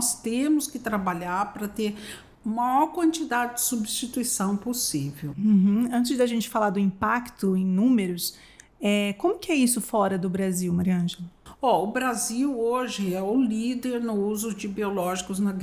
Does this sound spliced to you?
no; 0 cuts

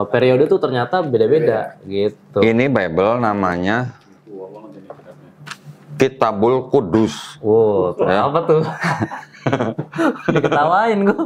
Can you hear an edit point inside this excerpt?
no; 0 cuts

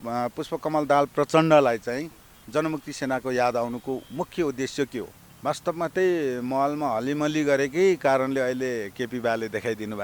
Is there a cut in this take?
yes; 1 cut; at 5.2 s

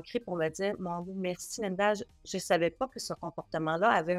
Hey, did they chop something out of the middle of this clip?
no; 0 cuts

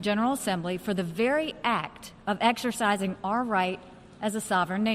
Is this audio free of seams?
yes; 0 cuts

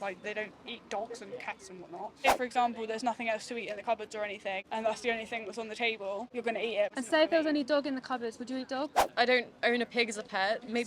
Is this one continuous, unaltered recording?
no; 4 cuts; at 2.3 s, 4.6 s, 6.8 s, 9.0 s

